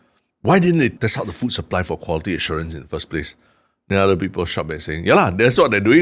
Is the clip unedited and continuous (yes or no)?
no